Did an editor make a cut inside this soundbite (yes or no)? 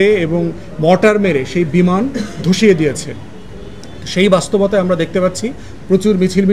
no